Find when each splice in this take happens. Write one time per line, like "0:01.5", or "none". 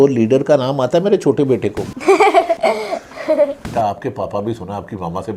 0:01.9
0:02.6
0:03.6